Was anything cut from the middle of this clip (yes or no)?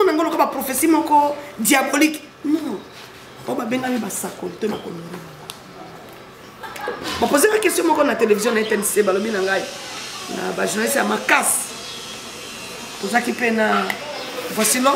yes